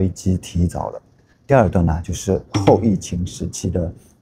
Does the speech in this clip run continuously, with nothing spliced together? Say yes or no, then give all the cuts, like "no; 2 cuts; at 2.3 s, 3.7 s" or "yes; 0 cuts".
yes; 0 cuts